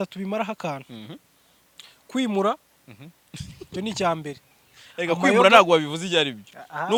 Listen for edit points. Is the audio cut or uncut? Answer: uncut